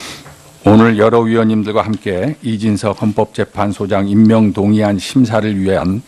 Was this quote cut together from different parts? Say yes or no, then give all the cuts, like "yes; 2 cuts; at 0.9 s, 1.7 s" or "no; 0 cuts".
yes; 1 cut; at 4.4 s